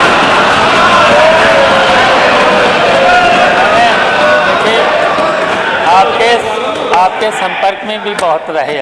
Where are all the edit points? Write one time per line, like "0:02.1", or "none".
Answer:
none